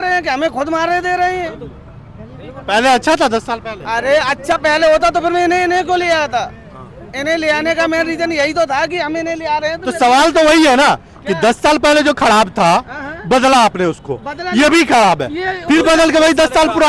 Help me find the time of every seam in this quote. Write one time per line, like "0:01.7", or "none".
none